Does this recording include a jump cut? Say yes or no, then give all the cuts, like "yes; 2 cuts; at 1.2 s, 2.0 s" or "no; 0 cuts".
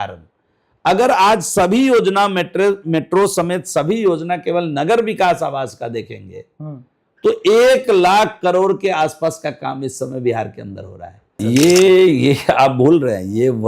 yes; 1 cut; at 11.4 s